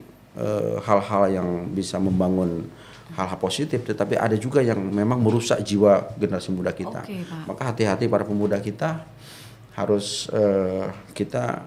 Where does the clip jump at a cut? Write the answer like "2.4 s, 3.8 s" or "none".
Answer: none